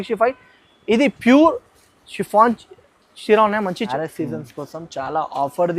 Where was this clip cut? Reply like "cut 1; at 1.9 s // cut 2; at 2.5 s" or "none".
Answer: cut 1; at 3.9 s